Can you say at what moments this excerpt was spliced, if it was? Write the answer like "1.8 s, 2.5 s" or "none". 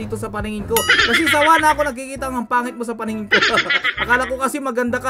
3.8 s